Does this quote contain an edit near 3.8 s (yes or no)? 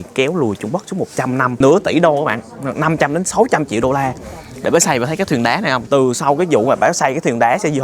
no